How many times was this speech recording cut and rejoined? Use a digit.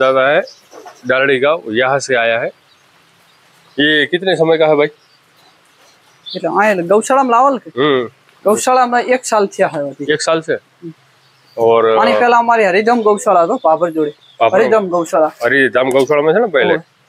0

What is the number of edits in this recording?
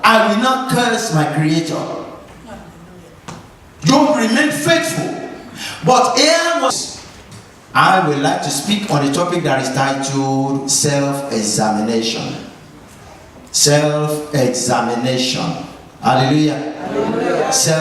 1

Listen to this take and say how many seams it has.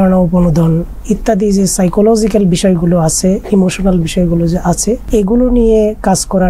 0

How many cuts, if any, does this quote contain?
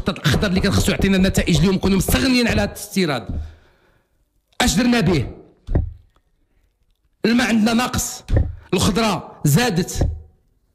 0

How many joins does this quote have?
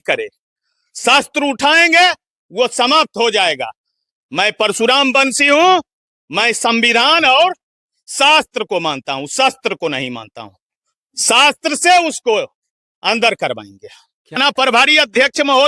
1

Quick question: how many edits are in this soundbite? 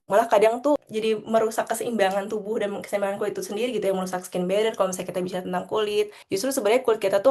1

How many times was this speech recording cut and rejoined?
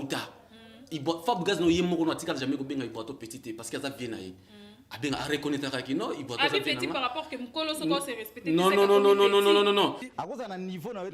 1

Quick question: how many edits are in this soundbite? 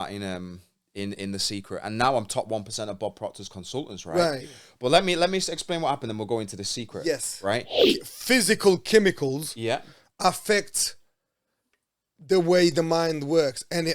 1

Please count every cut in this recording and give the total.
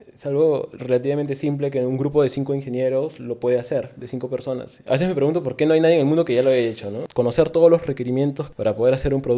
3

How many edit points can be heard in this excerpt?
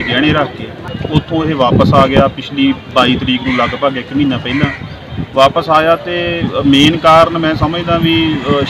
1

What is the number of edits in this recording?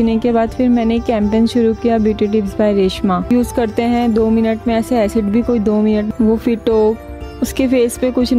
2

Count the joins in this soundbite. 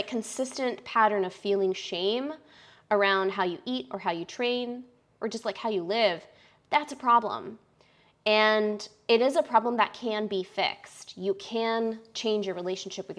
0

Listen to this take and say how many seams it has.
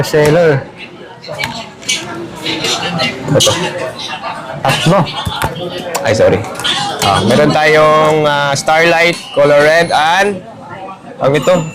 0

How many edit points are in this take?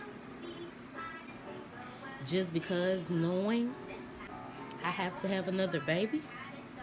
2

